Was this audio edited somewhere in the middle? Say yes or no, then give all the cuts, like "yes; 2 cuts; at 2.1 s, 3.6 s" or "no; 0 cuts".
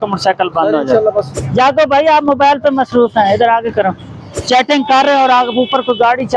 yes; 2 cuts; at 1.3 s, 4.3 s